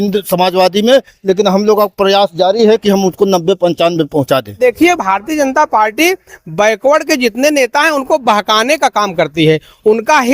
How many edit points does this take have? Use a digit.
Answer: 1